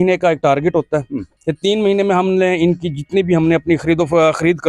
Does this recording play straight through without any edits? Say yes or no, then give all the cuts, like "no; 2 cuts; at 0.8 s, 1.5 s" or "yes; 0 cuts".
yes; 0 cuts